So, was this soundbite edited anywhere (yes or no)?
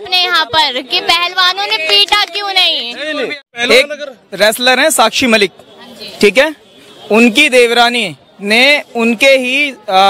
yes